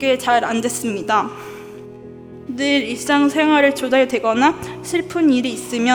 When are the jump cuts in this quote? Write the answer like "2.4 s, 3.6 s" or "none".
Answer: none

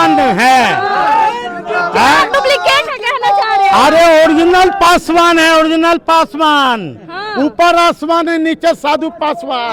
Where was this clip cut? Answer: none

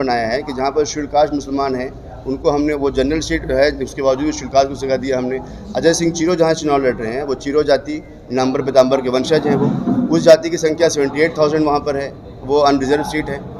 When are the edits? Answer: none

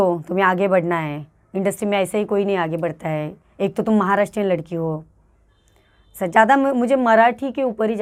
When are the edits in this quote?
none

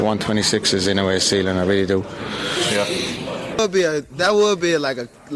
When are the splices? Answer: 3.6 s

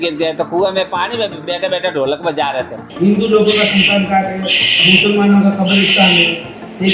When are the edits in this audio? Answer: 2.9 s

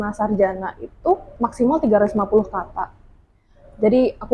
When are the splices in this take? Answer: 1.3 s

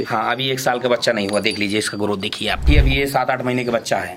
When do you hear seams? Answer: none

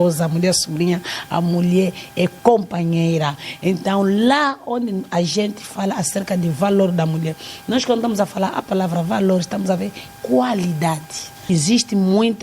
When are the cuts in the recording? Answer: 11.4 s

